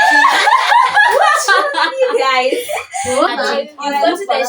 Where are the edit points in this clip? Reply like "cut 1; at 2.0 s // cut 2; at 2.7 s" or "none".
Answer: cut 1; at 3.3 s